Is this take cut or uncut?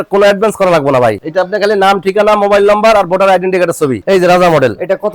cut